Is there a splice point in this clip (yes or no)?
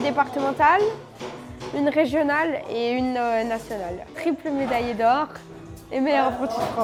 no